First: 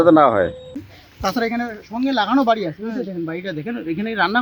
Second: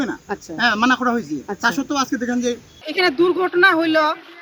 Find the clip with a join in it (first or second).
second